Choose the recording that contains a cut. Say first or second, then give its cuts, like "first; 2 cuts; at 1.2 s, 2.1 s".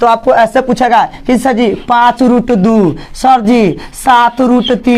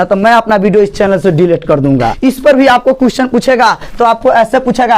second; 1 cut; at 2.1 s